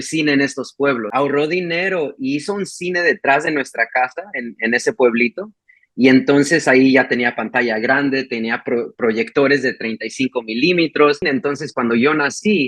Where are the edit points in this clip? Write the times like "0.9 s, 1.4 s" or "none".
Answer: 1.1 s, 11.2 s

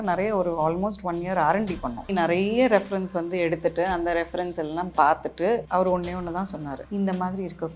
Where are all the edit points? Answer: 2.1 s, 5.7 s, 6.8 s

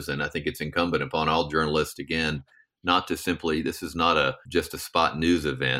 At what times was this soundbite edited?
4.4 s

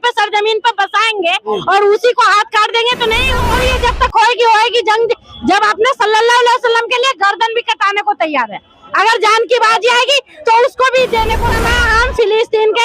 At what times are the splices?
3.5 s, 11.6 s

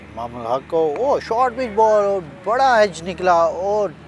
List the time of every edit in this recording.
none

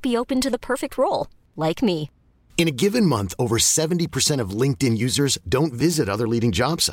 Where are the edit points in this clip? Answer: none

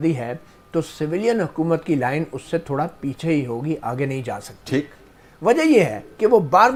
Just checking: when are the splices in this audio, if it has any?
none

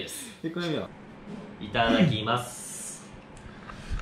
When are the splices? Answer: 0.9 s

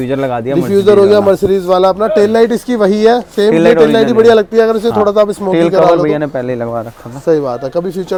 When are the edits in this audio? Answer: none

